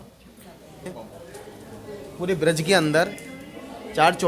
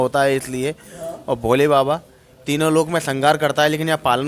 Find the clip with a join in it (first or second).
first